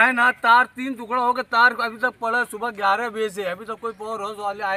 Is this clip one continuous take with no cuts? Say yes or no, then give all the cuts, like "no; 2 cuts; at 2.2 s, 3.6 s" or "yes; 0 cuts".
yes; 0 cuts